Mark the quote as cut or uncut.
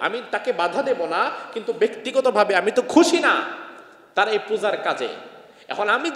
uncut